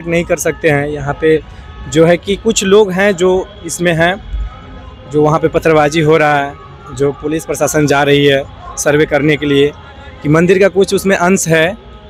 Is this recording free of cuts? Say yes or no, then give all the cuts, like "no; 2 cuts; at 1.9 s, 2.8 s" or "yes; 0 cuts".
yes; 0 cuts